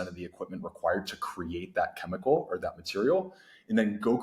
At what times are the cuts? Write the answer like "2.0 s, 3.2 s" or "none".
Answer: none